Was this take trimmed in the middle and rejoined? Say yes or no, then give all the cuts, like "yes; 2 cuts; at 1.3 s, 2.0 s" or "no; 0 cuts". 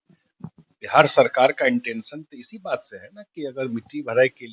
no; 0 cuts